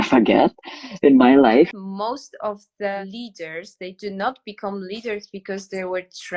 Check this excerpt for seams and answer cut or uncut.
cut